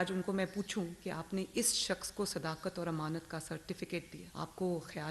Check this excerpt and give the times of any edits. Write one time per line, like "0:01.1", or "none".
0:04.2